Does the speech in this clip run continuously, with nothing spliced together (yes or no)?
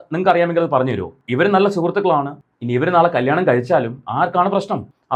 yes